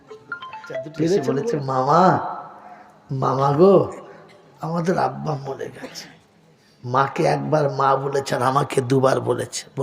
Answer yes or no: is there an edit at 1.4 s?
yes